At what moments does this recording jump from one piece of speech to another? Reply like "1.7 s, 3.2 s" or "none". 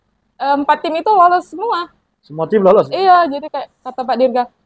none